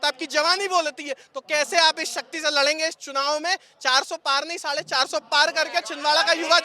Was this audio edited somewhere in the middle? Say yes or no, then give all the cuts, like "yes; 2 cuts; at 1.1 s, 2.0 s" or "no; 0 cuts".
no; 0 cuts